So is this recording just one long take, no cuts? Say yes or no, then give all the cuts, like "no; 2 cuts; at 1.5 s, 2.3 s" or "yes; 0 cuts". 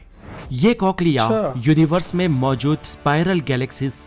yes; 0 cuts